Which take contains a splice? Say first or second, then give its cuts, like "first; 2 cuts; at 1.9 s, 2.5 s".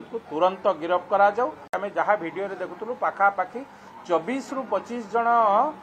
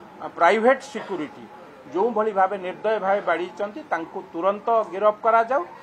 first; 1 cut; at 1.7 s